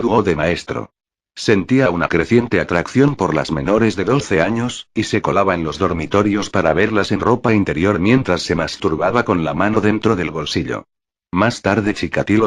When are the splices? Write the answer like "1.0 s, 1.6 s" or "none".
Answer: 9.8 s

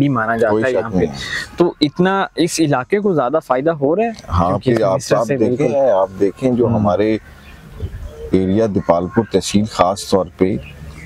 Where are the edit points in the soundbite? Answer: none

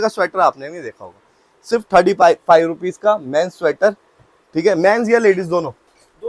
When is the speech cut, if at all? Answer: none

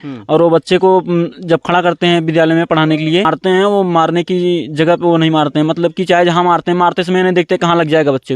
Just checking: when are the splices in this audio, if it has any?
3.3 s

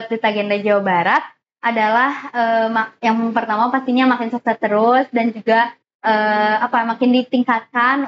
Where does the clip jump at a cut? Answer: none

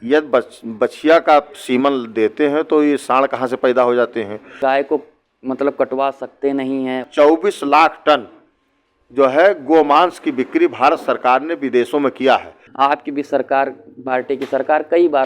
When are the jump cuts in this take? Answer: 4.6 s, 7.0 s, 12.6 s

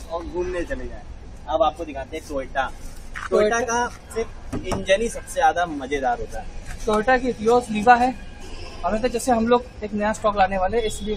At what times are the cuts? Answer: none

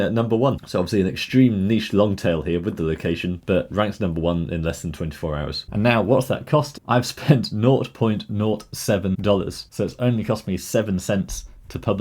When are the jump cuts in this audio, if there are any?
5.6 s, 6.8 s

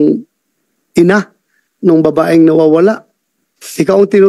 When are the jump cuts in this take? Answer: none

